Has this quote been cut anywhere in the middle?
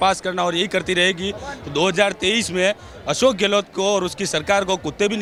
no; 0 cuts

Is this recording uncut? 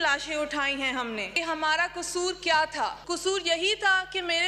no; 2 cuts; at 1.3 s, 3.0 s

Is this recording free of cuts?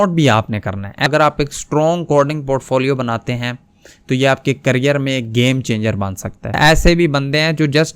no; 2 cuts; at 1.1 s, 6.6 s

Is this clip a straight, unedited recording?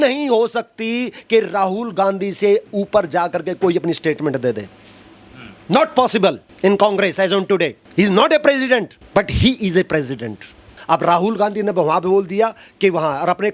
no; 4 cuts; at 6.5 s, 7.8 s, 9.0 s, 10.8 s

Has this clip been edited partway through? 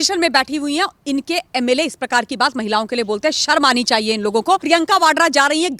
yes; 1 cut; at 4.6 s

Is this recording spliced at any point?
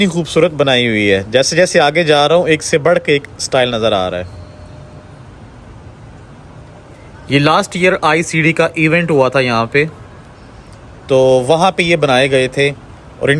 no; 0 cuts

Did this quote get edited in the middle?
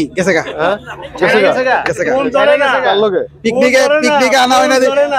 no; 0 cuts

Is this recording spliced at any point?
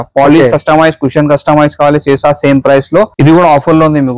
yes; 1 cut; at 3.1 s

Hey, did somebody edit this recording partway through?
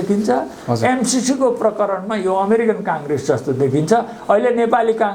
no; 0 cuts

